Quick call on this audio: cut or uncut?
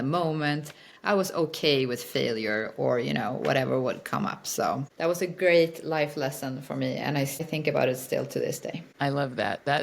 cut